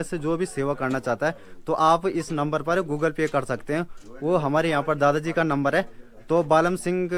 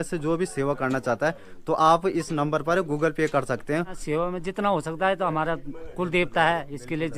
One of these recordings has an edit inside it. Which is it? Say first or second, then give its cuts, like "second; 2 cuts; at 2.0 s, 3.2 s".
second; 1 cut; at 4.0 s